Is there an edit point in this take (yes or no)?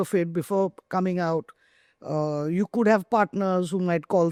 no